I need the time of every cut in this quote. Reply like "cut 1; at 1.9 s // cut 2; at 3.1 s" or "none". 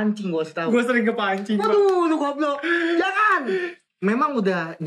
cut 1; at 3.8 s